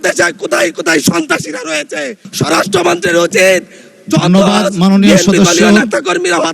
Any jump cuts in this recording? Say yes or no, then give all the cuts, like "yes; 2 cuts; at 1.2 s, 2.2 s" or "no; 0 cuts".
yes; 1 cut; at 2.2 s